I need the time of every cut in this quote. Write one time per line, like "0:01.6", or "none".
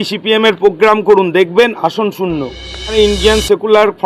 0:02.9

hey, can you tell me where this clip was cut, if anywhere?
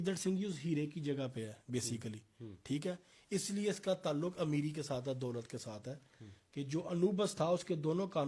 none

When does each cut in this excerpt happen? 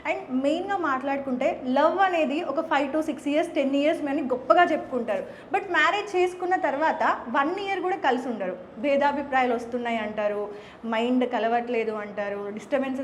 none

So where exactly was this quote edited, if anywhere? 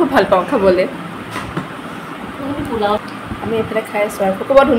0:03.0

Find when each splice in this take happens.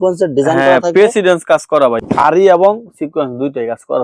0:02.0

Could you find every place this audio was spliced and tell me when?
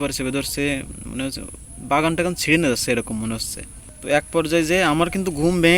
none

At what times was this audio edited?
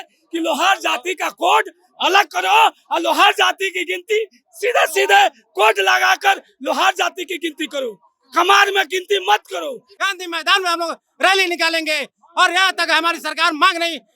0:09.9

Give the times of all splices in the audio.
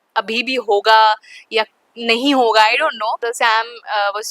0:03.3

